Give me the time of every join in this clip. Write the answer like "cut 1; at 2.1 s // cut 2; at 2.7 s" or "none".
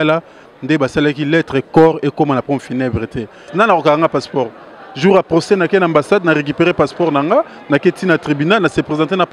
cut 1; at 3.5 s